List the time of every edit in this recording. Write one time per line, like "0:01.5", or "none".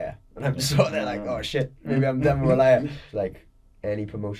0:03.0